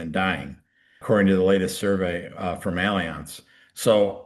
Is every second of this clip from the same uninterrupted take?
no; 1 cut; at 1.0 s

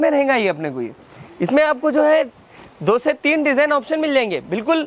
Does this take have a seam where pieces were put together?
no; 0 cuts

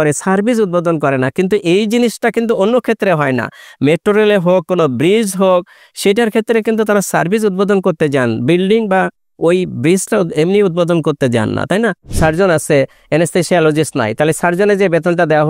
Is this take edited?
yes; 1 cut; at 12.1 s

